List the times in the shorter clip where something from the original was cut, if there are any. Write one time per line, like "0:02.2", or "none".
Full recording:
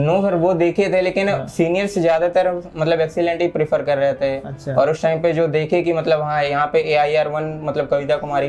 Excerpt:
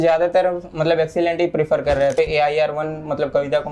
0:02.1